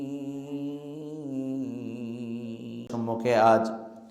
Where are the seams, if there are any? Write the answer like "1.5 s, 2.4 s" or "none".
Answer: 2.9 s